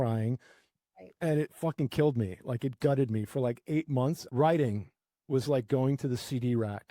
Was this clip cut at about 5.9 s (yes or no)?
no